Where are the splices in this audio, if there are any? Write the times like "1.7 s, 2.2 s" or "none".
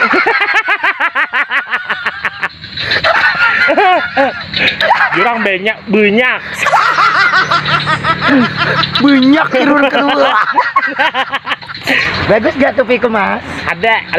4.8 s, 12.1 s